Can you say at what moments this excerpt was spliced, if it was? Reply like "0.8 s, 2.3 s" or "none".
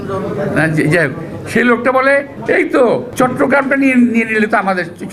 2.0 s, 3.1 s